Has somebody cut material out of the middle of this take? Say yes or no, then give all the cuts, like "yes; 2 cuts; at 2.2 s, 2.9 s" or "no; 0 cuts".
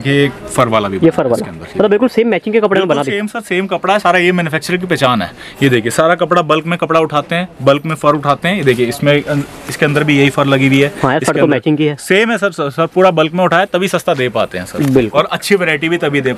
no; 0 cuts